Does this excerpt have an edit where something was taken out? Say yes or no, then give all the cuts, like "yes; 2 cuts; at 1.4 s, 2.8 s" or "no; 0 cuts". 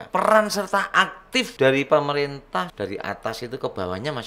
yes; 2 cuts; at 1.5 s, 2.7 s